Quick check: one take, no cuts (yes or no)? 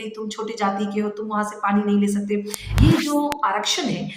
no